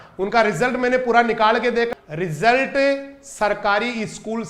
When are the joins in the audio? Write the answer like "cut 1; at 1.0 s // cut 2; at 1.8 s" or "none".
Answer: cut 1; at 1.9 s